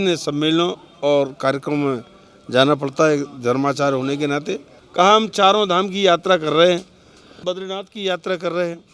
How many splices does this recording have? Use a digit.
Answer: 2